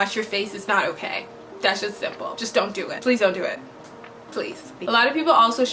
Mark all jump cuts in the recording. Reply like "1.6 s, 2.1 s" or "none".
4.7 s